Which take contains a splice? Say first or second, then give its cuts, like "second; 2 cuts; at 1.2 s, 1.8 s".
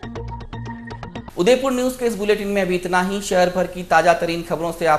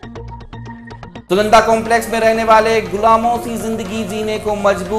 second; 1 cut; at 1.1 s